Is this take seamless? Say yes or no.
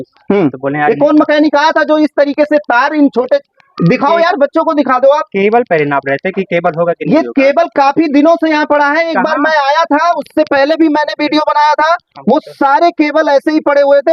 yes